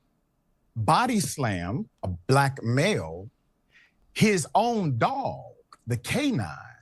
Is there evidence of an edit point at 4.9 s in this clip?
yes; 1 cut; at 4.9 s

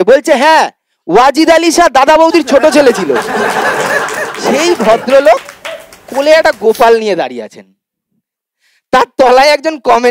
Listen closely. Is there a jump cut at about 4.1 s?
yes; 1 cut; at 4.1 s

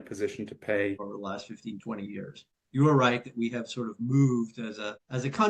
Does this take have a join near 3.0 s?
no; 1 cut; at 1.1 s

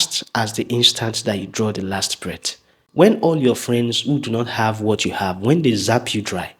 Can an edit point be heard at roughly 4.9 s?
no; 1 cut; at 2.8 s

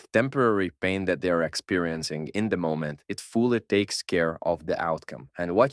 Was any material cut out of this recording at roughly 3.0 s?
yes; 1 cut; at 3.0 s

